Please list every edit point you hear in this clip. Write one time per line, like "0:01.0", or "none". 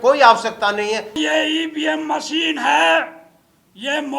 0:01.2